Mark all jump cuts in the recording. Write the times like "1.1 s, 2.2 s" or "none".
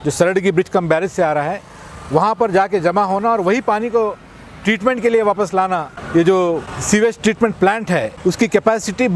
5.9 s, 6.7 s, 8.1 s